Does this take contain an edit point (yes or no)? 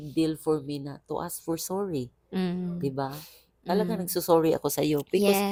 no